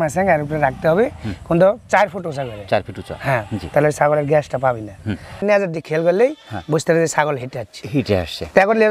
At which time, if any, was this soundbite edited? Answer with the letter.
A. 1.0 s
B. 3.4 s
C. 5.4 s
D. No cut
C